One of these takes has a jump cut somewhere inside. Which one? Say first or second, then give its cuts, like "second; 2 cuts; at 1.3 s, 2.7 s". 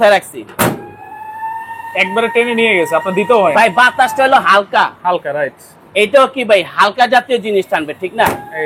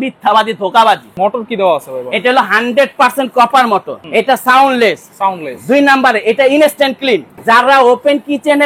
second; 3 cuts; at 1.1 s, 4.0 s, 7.3 s